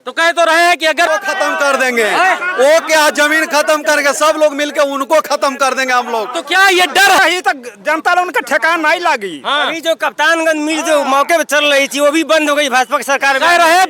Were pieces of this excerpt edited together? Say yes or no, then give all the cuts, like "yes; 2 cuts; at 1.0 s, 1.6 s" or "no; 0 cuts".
yes; 2 cuts; at 1.1 s, 7.2 s